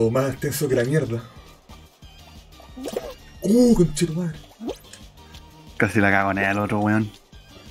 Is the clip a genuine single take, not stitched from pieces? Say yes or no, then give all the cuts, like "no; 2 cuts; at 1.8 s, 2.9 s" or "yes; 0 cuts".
yes; 0 cuts